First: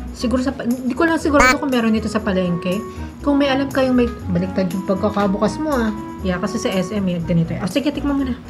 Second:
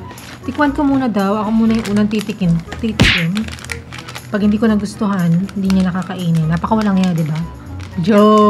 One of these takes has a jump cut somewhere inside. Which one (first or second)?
first